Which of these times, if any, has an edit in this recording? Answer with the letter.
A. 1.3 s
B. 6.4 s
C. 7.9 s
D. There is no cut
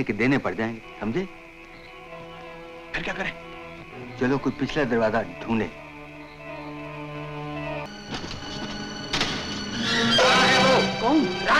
C